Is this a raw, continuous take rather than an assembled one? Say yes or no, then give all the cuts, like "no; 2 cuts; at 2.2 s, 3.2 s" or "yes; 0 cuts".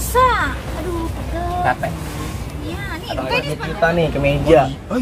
no; 1 cut; at 3.4 s